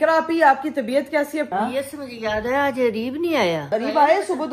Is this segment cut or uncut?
cut